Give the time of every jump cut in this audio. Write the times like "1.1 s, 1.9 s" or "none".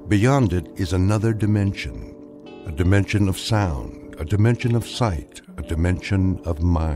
none